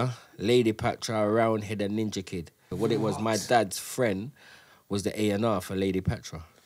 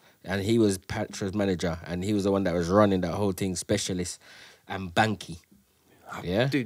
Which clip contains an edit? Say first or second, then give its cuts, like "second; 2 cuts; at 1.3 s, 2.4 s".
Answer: first; 1 cut; at 2.6 s